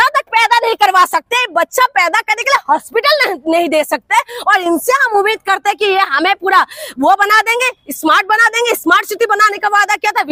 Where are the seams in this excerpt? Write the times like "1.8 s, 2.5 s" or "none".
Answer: none